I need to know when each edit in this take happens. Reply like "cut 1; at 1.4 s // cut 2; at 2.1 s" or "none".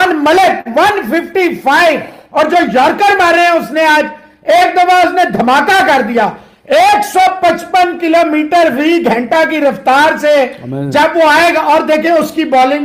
none